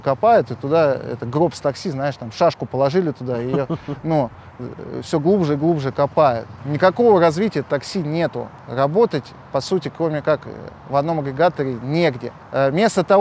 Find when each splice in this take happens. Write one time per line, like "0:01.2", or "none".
none